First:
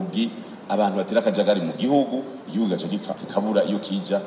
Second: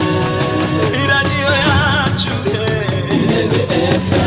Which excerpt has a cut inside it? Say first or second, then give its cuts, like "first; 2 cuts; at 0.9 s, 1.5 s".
first; 1 cut; at 3.1 s